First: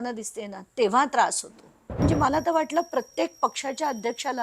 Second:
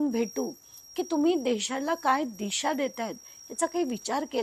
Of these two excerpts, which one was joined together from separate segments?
first; 1 cut; at 1.9 s

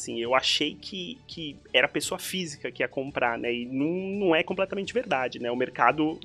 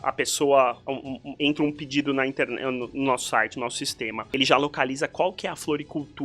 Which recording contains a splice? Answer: second; 1 cut; at 4.2 s

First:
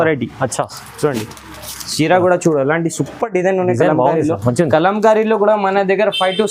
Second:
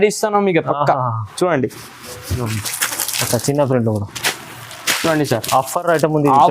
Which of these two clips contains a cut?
second; 1 cut; at 2.4 s

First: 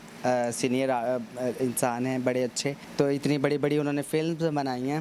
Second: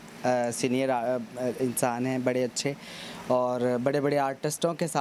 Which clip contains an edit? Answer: first; 1 cut; at 2.8 s

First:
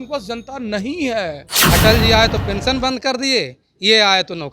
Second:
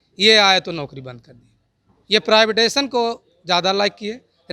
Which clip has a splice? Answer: first; 1 cut; at 1.5 s

